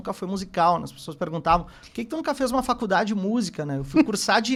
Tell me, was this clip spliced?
no; 0 cuts

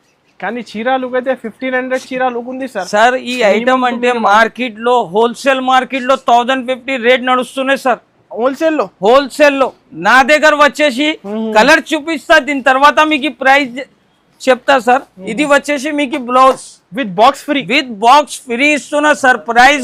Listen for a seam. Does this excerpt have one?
no; 0 cuts

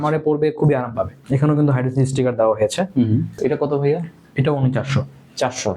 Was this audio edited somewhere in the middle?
yes; 2 cuts; at 1.2 s, 3.3 s

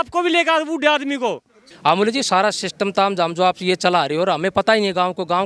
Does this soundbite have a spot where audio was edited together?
yes; 1 cut; at 1.6 s

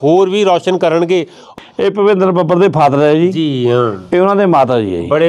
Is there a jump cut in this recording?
yes; 1 cut; at 1.4 s

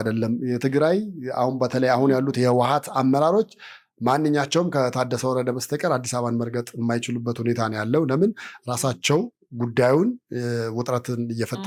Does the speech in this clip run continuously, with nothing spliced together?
yes; 0 cuts

